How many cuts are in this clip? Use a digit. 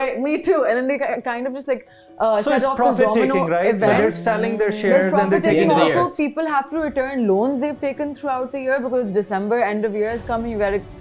0